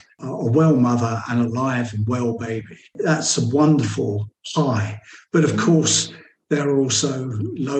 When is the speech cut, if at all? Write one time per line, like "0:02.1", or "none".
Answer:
none

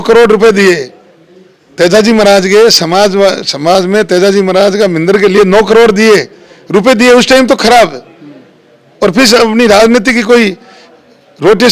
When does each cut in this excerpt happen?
none

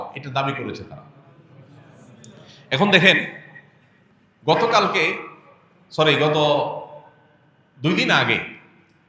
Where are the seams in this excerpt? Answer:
none

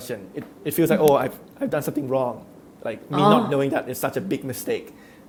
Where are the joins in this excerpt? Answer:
none

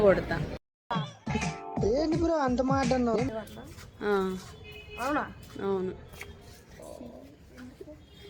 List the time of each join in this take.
0:03.3

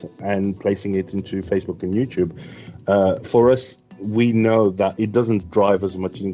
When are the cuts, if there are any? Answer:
0:04.9

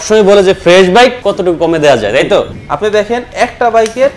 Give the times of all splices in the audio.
0:01.2
0:02.6

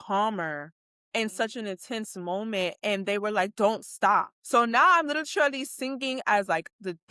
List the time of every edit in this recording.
0:04.4

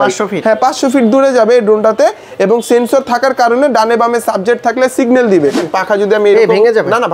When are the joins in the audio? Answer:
0:05.6

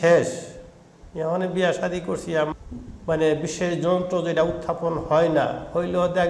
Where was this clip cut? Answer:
0:02.5

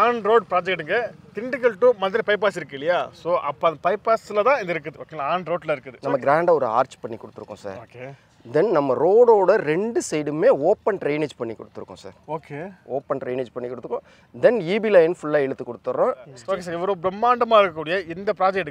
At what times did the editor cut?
0:05.9
0:16.3

